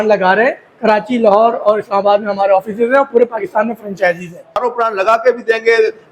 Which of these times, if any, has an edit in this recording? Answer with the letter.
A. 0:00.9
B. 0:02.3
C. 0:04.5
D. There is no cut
C